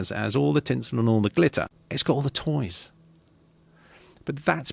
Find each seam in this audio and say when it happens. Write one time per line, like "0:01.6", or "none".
0:01.8